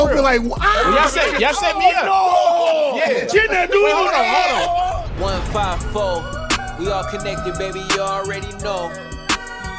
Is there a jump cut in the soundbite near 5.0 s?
yes; 1 cut; at 5.0 s

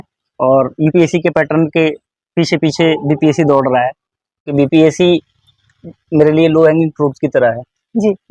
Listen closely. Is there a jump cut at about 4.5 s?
yes; 1 cut; at 4.5 s

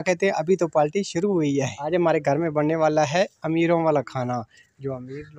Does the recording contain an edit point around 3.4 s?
no; 1 cut; at 1.8 s

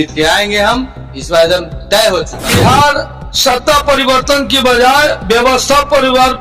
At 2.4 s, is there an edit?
yes; 1 cut; at 2.4 s

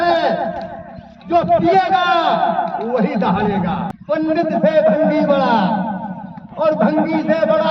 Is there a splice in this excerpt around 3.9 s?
yes; 1 cut; at 3.9 s

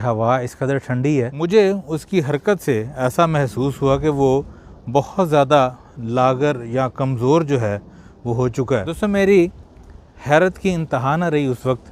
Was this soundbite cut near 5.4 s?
no; 2 cuts; at 1.3 s, 8.9 s

